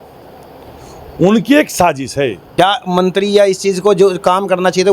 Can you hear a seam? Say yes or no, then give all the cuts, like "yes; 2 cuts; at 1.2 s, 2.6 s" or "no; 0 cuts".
yes; 1 cut; at 2.4 s